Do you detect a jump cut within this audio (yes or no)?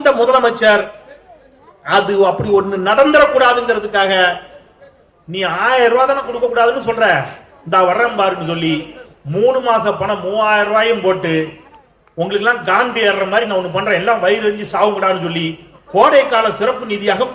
no